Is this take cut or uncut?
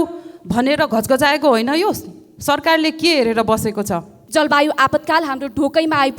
cut